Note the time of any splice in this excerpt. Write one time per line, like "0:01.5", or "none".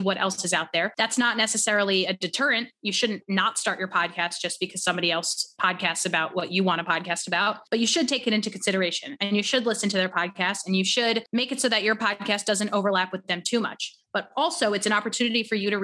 0:00.9
0:07.6
0:11.3